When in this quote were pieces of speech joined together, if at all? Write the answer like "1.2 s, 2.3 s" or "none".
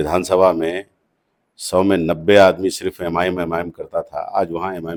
none